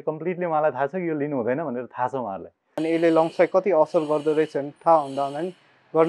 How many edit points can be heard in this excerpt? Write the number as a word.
one